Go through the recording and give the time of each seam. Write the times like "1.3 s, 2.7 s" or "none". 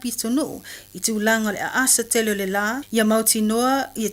1.9 s